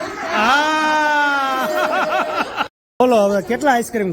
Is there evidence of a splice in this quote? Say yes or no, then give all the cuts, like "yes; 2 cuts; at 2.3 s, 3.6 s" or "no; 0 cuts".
yes; 1 cut; at 2.9 s